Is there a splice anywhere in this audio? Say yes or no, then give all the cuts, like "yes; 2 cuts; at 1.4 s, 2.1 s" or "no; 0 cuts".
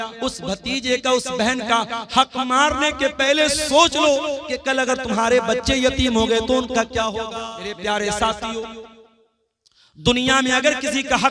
yes; 1 cut; at 7.8 s